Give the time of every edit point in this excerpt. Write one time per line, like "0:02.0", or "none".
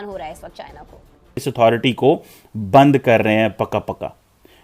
0:01.4